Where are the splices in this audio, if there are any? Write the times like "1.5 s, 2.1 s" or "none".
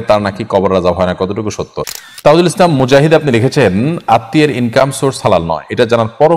1.8 s